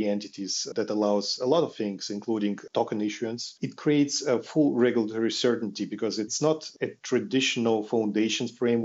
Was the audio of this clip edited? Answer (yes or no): yes